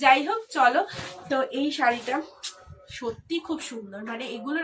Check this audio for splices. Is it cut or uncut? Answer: uncut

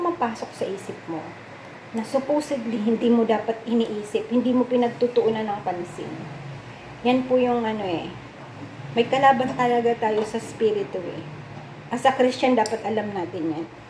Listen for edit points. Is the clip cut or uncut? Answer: uncut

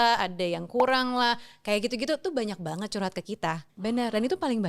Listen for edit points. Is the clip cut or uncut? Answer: cut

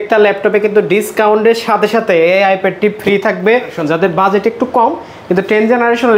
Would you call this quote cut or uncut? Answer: cut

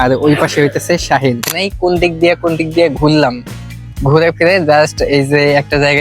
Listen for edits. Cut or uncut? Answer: cut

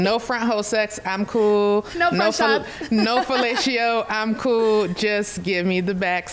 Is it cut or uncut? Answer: uncut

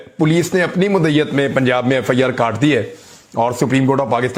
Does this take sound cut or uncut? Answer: uncut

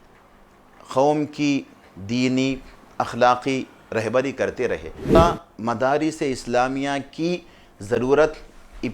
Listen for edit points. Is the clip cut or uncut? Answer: cut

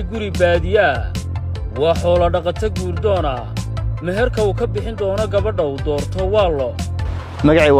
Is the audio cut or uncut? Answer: uncut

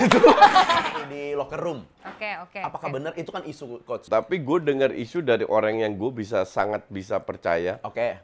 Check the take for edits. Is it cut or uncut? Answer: cut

